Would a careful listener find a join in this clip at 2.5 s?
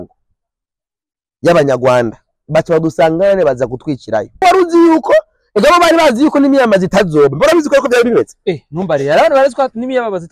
no; 1 cut; at 4.4 s

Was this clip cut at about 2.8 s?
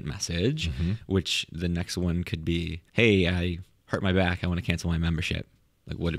yes; 1 cut; at 2.8 s

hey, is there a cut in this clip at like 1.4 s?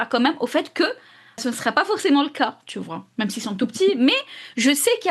yes; 1 cut; at 1.4 s

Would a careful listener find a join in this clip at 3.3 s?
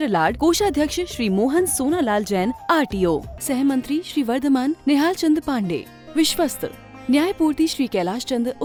no; 0 cuts

